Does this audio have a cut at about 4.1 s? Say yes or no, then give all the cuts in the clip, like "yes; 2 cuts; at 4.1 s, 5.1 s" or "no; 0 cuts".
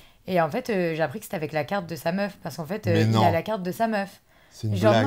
no; 0 cuts